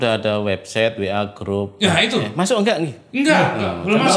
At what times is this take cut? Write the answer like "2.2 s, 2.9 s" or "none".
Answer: none